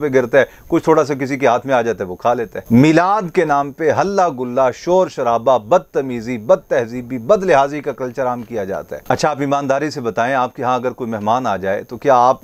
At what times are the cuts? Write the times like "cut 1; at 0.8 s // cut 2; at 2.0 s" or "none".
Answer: none